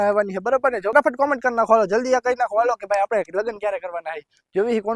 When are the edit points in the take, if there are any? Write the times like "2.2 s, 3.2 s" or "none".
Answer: 0.9 s